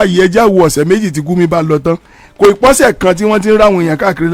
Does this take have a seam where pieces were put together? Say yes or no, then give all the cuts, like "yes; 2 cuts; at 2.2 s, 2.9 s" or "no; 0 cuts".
no; 0 cuts